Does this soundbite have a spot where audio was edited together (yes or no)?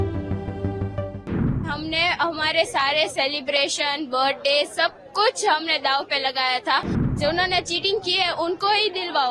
yes